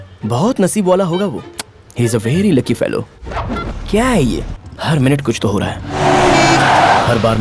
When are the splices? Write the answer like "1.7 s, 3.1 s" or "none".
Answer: 3.7 s